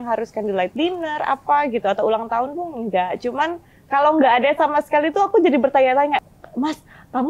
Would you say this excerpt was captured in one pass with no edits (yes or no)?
no